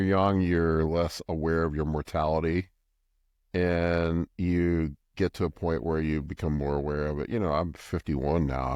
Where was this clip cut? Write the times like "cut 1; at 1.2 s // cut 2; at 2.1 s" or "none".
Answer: none

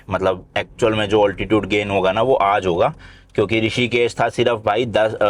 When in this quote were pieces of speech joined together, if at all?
none

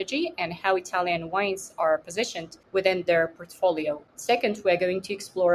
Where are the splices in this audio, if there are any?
none

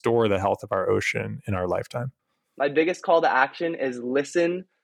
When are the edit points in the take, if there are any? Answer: cut 1; at 2.4 s

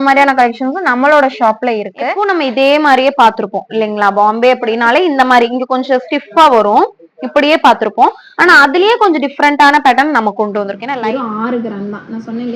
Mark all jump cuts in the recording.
cut 1; at 2.0 s // cut 2; at 10.8 s

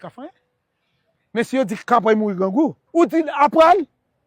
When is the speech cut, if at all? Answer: cut 1; at 2.8 s

